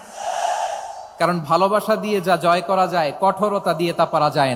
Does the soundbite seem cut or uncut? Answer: uncut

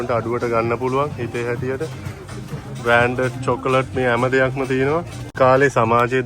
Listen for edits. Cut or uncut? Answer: cut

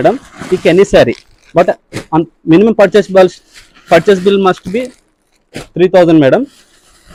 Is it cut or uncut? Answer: uncut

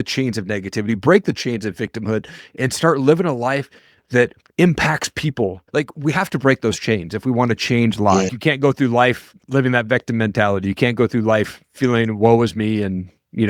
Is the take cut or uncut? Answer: cut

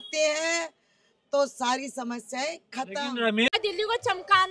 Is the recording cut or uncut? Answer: cut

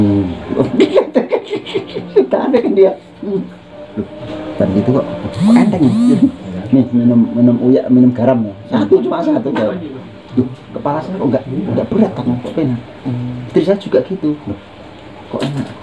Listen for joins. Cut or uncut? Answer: cut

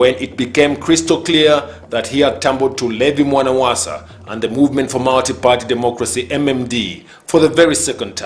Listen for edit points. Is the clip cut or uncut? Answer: cut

